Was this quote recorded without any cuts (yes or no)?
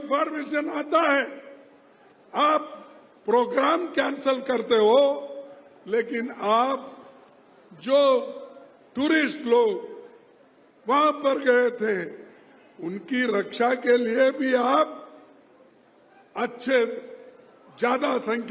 yes